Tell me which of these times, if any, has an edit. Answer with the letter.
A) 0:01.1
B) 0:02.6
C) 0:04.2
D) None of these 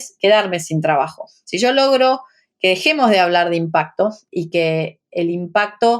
C